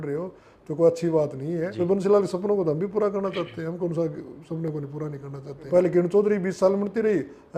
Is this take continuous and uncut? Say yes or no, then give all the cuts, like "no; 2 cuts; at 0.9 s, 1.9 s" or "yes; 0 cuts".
no; 2 cuts; at 1.7 s, 5.7 s